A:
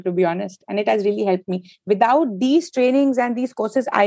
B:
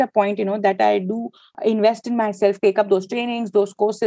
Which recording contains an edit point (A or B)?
B